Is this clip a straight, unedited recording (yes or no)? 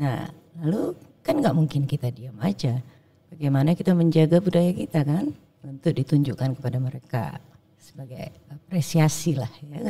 no